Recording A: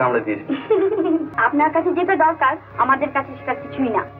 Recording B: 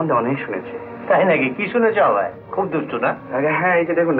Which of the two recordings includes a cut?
A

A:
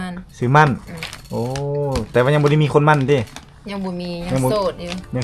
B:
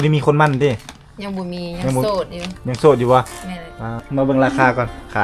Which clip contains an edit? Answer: B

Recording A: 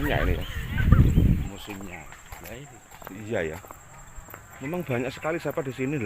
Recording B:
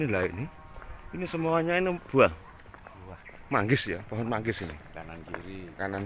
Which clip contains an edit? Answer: A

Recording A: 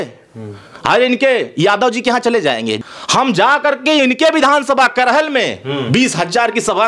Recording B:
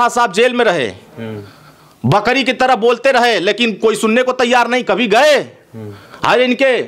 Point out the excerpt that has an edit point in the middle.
A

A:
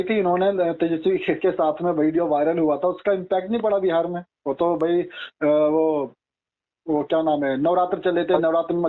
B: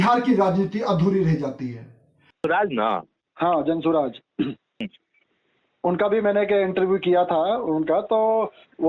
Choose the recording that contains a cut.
B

